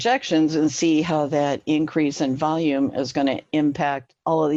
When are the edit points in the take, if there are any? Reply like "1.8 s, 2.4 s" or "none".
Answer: none

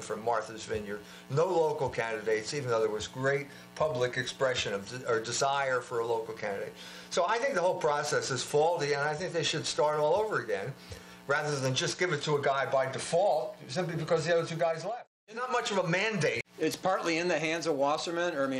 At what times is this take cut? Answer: 15.3 s, 16.5 s

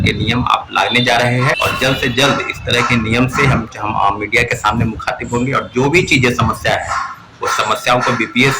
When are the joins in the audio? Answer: 1.6 s

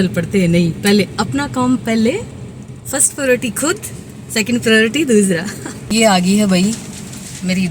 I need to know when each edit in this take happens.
5.9 s

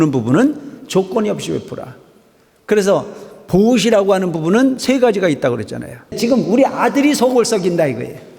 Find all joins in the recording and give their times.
6.1 s

